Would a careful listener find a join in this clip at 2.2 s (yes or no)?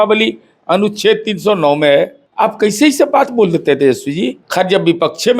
yes